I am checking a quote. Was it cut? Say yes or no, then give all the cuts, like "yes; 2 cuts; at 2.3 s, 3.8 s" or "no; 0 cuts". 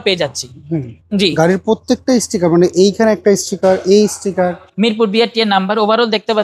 yes; 2 cuts; at 0.9 s, 4.6 s